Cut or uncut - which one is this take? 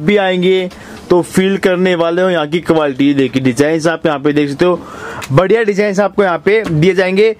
uncut